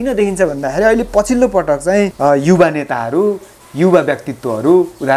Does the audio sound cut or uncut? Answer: cut